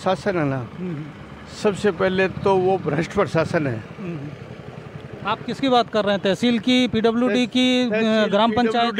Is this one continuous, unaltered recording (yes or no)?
yes